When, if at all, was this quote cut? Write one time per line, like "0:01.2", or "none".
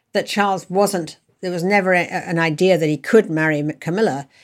0:01.3